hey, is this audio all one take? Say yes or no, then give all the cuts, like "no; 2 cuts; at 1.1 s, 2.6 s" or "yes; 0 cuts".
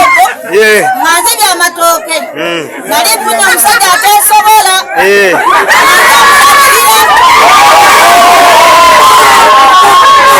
yes; 0 cuts